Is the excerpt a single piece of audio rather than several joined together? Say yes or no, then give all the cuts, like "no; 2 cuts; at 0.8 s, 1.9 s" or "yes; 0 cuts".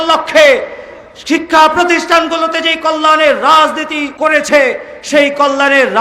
no; 1 cut; at 4.0 s